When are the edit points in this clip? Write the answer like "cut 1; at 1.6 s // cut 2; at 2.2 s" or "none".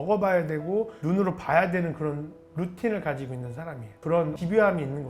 cut 1; at 4.1 s